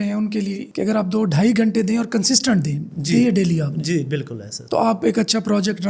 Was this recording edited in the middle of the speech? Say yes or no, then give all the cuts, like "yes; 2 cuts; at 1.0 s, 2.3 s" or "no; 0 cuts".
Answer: no; 0 cuts